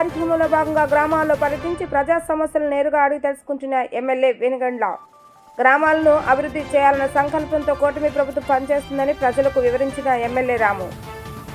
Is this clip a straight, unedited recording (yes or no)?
yes